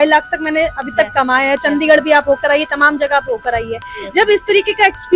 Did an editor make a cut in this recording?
no; 0 cuts

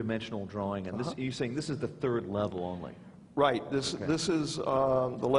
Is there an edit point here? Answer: no; 0 cuts

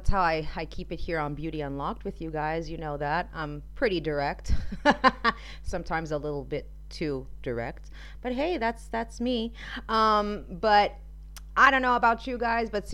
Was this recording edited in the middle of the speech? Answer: no; 0 cuts

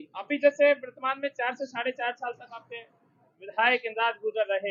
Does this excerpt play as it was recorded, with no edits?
yes; 0 cuts

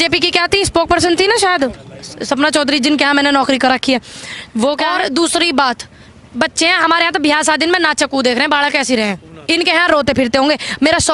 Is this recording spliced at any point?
yes; 1 cut; at 4.9 s

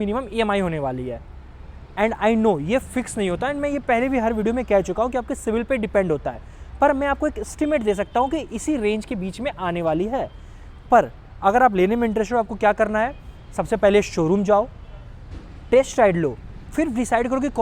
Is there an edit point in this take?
no; 0 cuts

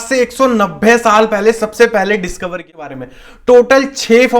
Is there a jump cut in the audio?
yes; 1 cut; at 2.7 s

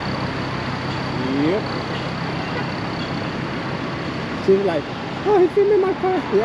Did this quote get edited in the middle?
no; 0 cuts

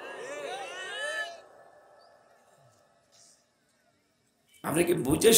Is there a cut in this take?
no; 0 cuts

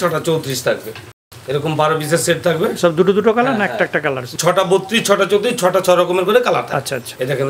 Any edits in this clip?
no; 0 cuts

